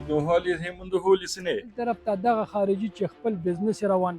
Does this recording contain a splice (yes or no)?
yes